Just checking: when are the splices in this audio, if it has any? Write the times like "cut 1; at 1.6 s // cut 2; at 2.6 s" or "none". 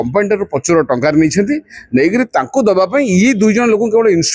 none

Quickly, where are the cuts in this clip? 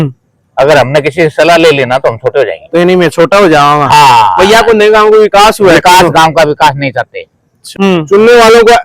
cut 1; at 7.7 s

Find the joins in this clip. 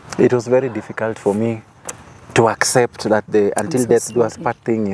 none

